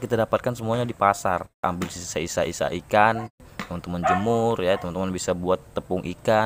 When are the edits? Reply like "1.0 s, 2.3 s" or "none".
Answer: 1.6 s, 3.5 s